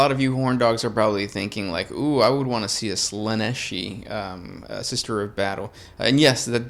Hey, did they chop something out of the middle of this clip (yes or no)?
no